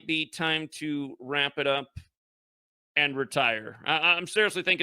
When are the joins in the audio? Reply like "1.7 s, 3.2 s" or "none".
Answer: 3.8 s

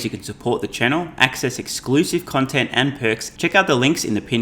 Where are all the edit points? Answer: 3.3 s

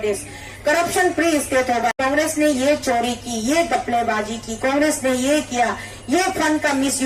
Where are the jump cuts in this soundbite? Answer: 1.9 s

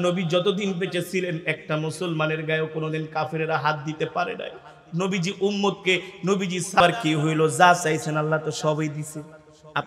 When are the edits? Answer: 6.8 s

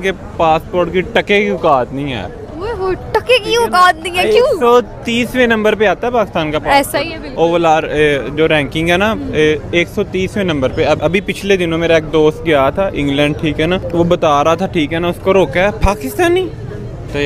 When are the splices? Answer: none

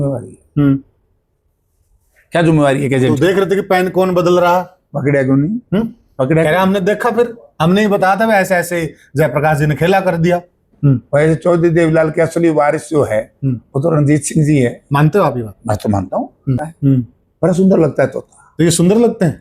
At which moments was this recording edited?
10.7 s, 16.6 s

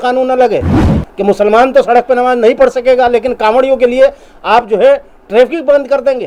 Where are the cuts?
none

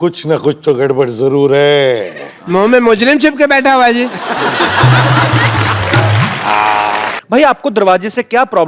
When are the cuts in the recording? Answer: 7.2 s

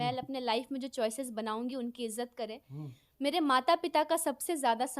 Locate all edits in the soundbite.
none

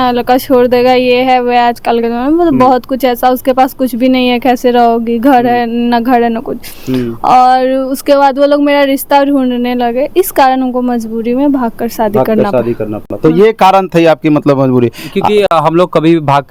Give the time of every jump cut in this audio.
none

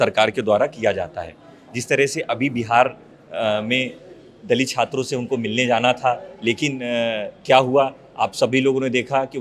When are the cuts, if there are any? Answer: none

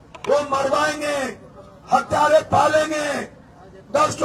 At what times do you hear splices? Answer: none

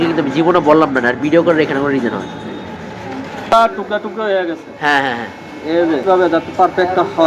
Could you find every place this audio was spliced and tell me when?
3.5 s, 6.1 s

